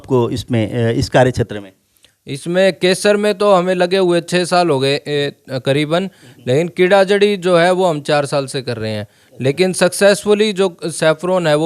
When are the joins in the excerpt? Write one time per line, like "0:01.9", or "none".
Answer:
none